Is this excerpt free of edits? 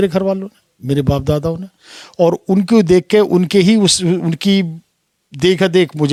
yes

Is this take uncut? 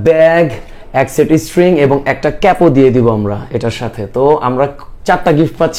yes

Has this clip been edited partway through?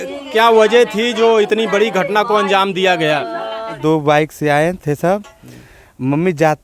yes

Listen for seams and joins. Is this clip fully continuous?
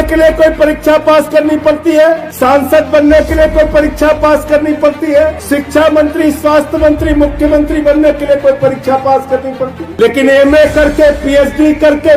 no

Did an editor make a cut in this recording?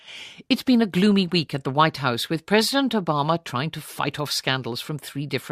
yes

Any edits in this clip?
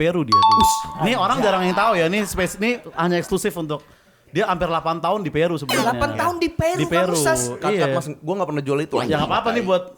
no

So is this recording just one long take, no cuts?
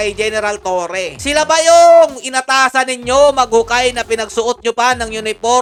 yes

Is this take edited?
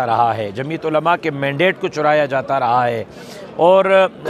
no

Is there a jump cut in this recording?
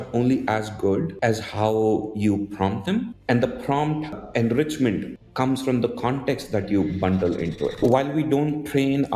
yes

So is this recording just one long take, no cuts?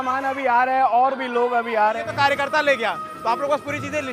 no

